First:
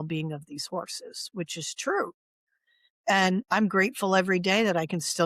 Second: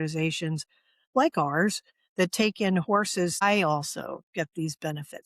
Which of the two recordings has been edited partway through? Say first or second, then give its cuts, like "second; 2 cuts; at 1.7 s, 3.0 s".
second; 1 cut; at 3.4 s